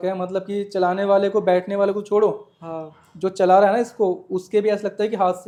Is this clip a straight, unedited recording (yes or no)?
yes